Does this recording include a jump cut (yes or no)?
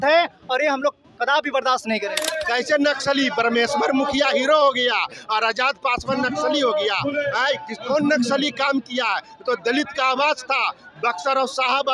yes